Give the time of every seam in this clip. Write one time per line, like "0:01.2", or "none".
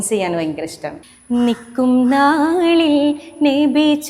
0:01.0